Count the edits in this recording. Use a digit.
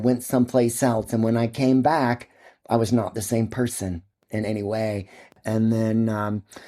2